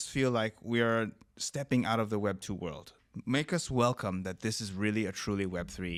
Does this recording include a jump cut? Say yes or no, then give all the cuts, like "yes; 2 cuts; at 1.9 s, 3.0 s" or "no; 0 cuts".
no; 0 cuts